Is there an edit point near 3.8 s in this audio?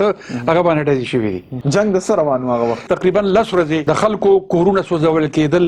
yes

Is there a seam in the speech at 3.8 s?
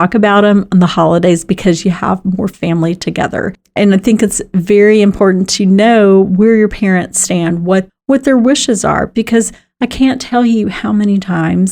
yes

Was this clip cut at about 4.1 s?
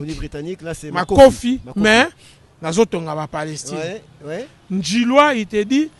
no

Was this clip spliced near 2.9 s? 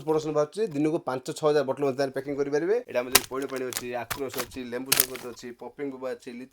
yes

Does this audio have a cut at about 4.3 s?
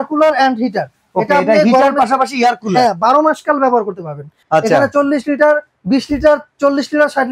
yes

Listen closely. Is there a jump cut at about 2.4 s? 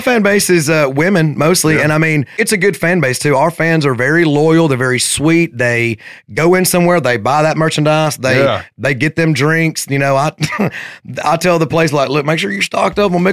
yes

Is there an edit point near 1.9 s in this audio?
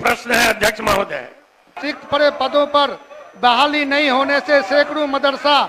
yes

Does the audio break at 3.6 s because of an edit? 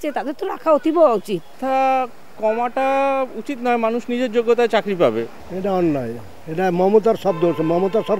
no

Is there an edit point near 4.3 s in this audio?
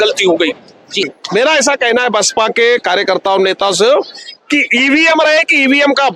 no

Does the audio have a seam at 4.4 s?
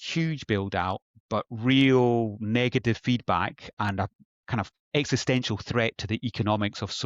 no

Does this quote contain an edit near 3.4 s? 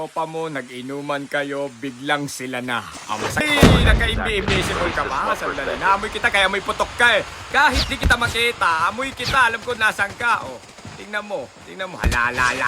yes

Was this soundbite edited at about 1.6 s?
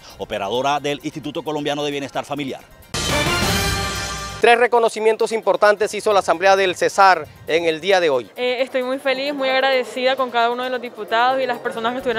no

